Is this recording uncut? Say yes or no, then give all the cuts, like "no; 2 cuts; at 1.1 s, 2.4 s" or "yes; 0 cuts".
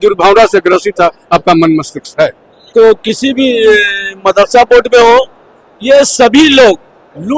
no; 1 cut; at 2.6 s